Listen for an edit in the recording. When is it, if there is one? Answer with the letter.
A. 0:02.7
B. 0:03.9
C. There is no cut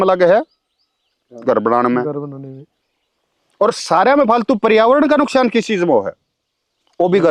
C